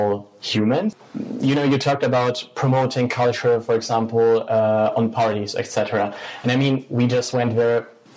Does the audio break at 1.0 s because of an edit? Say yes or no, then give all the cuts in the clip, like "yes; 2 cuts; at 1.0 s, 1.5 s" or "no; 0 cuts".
yes; 1 cut; at 1.0 s